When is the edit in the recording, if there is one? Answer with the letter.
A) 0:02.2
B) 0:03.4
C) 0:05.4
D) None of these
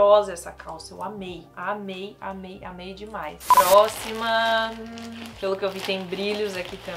D